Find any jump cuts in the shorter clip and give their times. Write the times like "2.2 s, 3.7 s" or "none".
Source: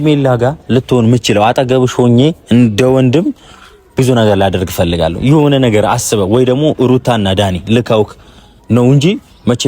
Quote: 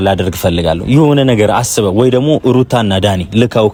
none